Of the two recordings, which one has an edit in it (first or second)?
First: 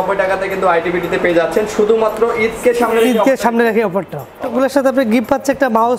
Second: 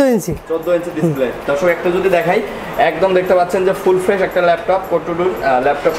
first